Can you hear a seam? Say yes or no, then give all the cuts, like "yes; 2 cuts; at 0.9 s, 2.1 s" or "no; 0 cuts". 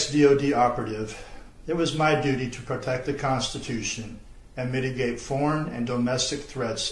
yes; 1 cut; at 3.6 s